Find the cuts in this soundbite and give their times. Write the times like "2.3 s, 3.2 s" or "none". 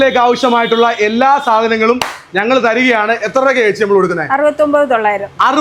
none